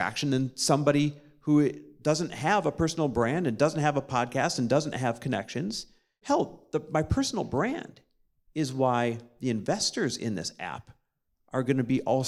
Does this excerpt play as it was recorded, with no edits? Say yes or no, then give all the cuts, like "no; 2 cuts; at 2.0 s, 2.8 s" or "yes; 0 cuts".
no; 1 cut; at 6.1 s